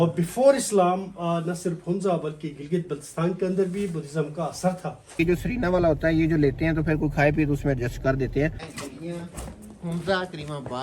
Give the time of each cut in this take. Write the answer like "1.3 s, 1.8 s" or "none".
5.2 s, 8.7 s